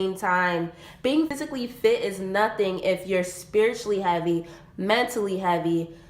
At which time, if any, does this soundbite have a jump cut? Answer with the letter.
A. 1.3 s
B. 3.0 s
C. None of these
A